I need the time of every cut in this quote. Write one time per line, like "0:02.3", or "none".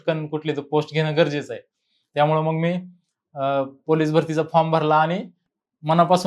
none